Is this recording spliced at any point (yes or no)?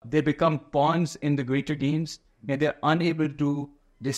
no